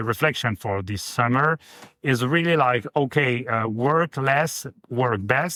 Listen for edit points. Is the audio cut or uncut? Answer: uncut